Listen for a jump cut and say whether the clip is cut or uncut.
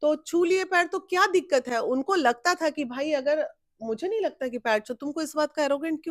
uncut